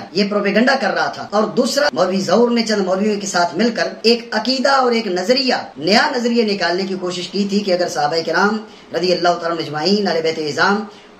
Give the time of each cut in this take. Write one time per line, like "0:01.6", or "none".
0:01.5